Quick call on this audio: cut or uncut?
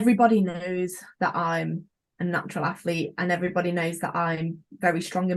uncut